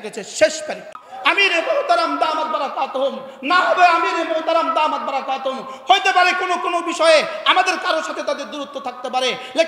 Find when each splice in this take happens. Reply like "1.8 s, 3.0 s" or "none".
1.1 s